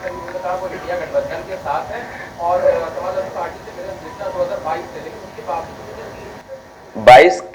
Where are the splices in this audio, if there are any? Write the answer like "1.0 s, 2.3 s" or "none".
6.4 s